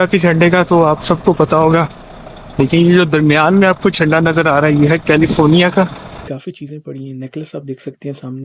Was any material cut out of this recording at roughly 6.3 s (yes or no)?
yes